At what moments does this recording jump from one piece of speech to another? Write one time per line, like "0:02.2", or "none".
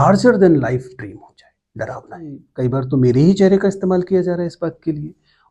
0:02.4